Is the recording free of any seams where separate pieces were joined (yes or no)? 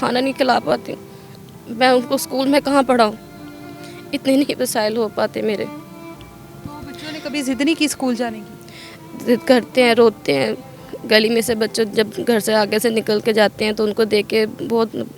yes